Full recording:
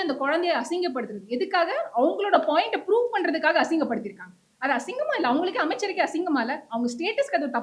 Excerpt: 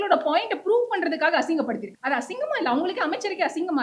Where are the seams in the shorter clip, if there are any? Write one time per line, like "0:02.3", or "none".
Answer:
0:01.9